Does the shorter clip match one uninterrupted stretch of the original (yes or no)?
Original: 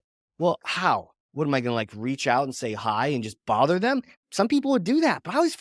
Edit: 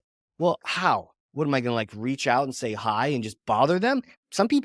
yes